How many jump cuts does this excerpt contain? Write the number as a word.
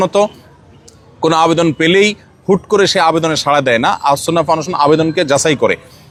zero